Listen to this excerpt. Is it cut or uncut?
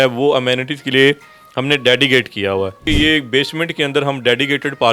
cut